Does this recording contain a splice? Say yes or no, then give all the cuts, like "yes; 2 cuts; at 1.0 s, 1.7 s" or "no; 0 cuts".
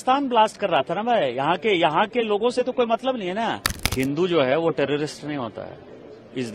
yes; 1 cut; at 3.7 s